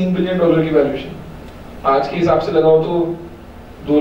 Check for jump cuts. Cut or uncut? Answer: uncut